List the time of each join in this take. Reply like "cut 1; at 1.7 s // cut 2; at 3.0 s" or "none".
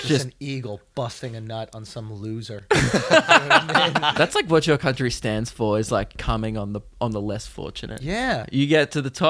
cut 1; at 4.1 s // cut 2; at 6.2 s // cut 3; at 8.5 s